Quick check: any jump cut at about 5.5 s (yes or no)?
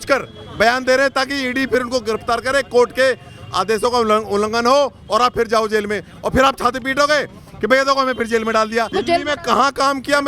no